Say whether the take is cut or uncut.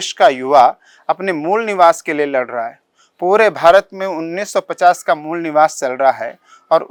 uncut